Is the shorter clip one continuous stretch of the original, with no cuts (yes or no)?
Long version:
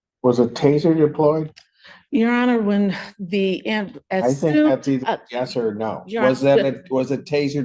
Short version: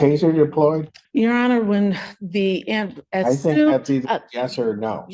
no